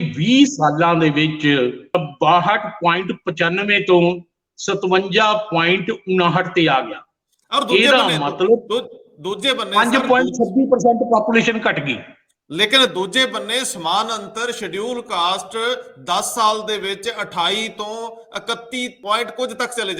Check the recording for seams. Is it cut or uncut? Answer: cut